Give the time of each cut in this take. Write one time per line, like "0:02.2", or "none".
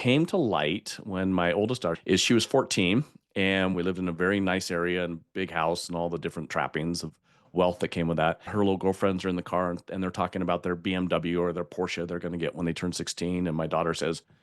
0:02.0
0:03.7
0:08.5